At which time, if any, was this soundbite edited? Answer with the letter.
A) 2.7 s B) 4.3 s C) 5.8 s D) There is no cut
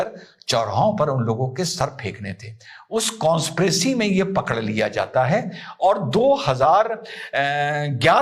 D